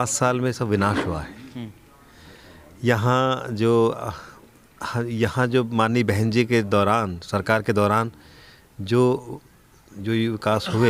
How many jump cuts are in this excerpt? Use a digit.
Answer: 0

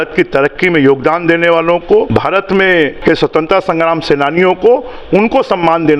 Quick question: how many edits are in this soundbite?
2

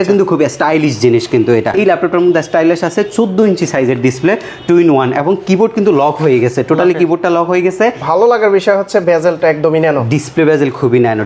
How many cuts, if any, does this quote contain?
2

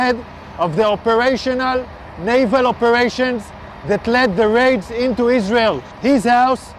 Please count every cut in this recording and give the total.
1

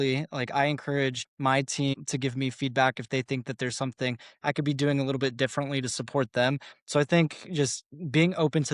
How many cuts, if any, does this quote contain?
1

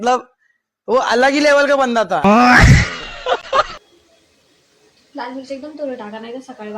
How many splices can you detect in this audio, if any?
1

